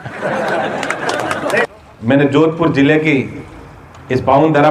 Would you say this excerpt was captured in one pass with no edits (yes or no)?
no